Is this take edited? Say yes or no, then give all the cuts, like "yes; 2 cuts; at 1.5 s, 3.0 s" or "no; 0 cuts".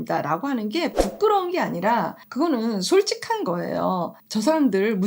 yes; 2 cuts; at 2.2 s, 4.2 s